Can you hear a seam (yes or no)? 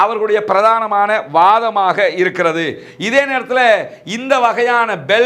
no